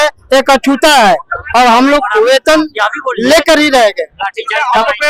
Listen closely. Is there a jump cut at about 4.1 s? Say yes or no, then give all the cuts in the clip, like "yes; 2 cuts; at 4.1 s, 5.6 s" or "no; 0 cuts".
no; 0 cuts